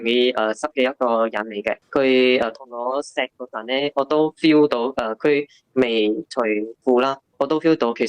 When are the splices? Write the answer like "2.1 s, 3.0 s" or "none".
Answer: 1.8 s, 7.1 s